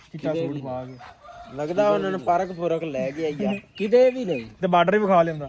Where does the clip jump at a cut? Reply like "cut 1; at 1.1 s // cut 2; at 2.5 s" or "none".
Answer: none